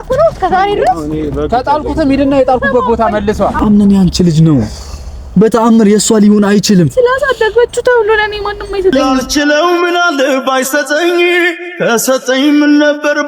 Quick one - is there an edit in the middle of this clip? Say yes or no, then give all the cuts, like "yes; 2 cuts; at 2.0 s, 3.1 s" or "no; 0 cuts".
yes; 1 cut; at 3.5 s